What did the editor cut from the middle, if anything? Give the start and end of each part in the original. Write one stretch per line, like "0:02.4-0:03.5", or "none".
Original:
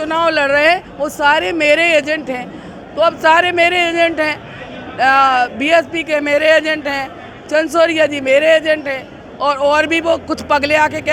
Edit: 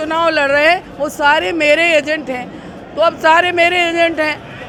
none